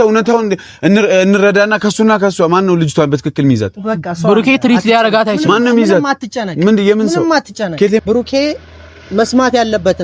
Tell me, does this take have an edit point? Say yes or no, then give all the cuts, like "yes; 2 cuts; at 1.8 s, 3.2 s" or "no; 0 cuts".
yes; 1 cut; at 8.0 s